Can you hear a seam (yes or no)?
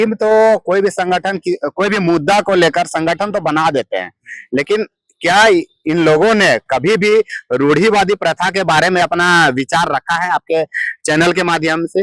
no